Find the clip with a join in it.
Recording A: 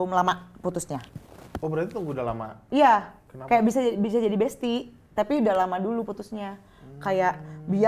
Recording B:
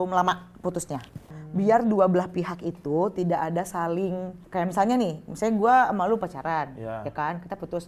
B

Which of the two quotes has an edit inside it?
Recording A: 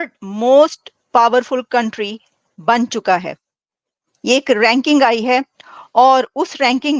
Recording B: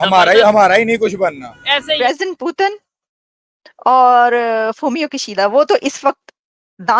B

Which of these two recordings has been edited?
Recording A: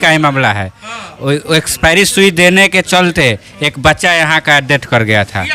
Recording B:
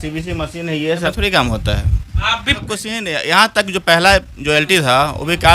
B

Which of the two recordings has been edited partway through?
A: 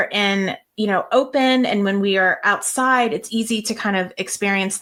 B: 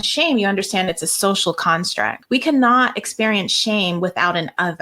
B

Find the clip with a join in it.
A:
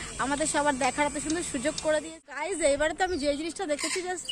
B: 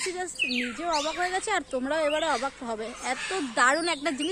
A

